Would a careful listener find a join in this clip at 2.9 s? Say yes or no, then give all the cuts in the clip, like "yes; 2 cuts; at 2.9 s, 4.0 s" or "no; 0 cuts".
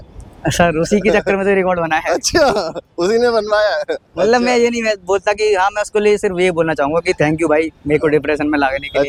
no; 0 cuts